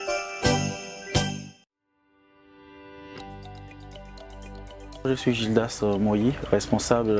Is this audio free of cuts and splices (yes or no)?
no